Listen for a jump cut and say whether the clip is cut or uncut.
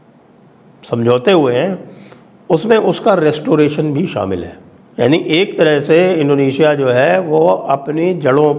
uncut